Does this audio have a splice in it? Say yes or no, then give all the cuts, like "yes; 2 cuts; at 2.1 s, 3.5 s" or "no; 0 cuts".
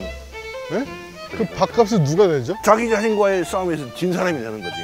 yes; 2 cuts; at 1.2 s, 2.5 s